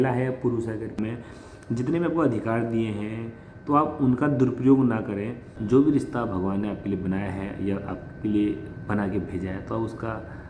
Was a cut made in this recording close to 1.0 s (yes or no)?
yes